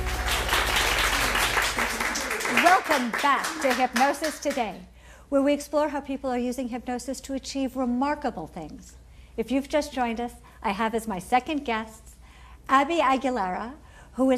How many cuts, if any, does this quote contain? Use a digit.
1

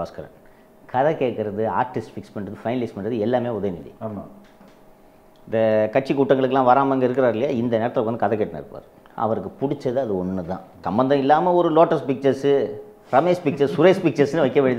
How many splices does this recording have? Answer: 1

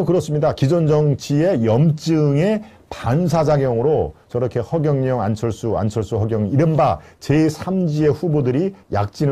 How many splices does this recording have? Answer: 0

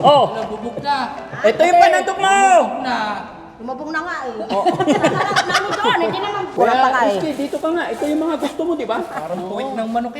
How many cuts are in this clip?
1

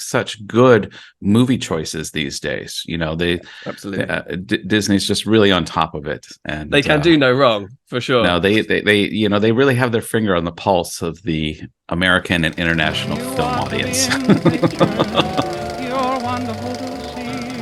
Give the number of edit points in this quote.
1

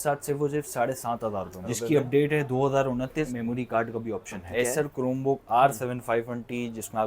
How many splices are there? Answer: 2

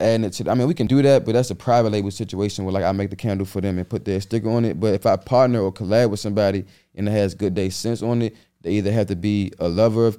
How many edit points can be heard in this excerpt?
1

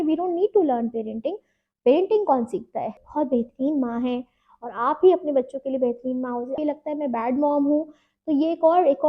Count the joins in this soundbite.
2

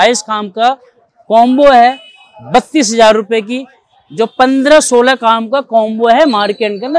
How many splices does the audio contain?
0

